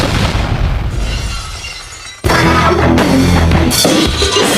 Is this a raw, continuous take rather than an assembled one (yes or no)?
no